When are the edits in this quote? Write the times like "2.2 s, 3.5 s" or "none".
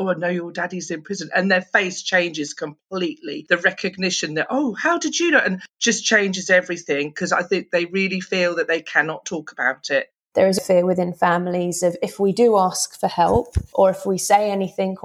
10.6 s